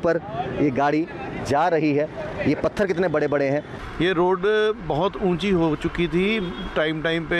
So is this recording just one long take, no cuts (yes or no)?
no